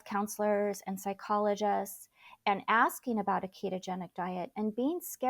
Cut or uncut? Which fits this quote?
uncut